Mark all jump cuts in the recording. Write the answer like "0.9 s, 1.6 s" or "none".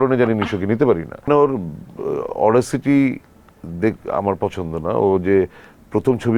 1.3 s